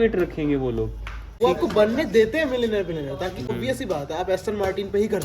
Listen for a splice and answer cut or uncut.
cut